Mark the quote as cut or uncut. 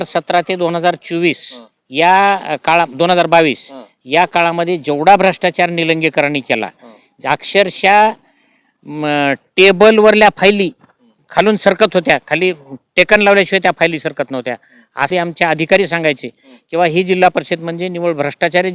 cut